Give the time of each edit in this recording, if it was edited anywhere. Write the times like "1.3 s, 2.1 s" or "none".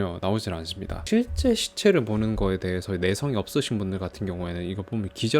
1.0 s